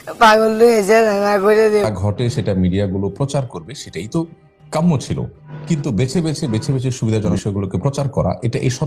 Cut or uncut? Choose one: cut